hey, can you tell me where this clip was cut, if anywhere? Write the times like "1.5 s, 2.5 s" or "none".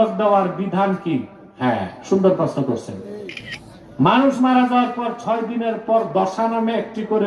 3.4 s